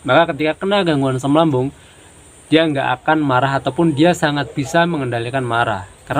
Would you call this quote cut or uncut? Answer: uncut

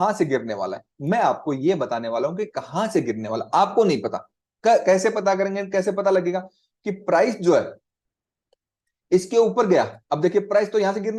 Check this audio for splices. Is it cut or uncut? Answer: uncut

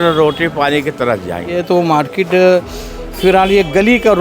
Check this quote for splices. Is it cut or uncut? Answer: cut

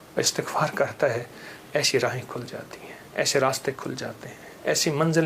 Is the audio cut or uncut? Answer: uncut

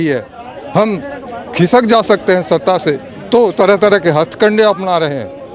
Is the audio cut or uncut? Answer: uncut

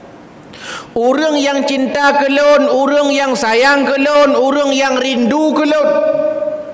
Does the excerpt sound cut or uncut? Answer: uncut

